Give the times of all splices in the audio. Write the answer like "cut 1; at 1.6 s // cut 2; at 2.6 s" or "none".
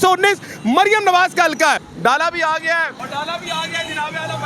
cut 1; at 1.9 s // cut 2; at 3.0 s